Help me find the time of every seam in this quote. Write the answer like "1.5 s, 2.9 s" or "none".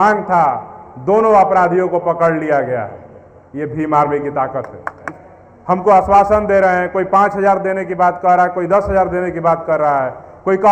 5.1 s